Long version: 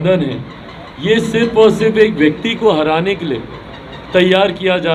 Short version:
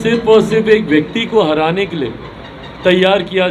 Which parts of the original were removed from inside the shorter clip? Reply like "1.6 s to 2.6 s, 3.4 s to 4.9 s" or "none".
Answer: none